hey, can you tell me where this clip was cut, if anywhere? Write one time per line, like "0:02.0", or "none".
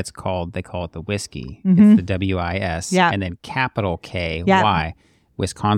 none